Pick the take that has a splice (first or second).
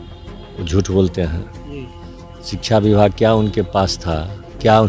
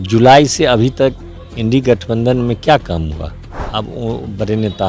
second